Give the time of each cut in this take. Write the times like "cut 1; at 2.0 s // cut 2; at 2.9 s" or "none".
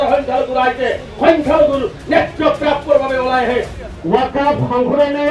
cut 1; at 3.7 s